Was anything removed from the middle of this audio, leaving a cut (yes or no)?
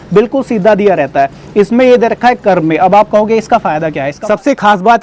yes